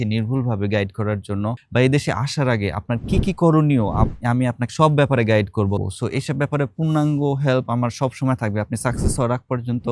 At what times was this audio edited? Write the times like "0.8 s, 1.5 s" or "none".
1.6 s, 5.8 s